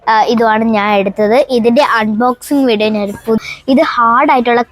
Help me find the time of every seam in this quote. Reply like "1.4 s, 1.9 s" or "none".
3.4 s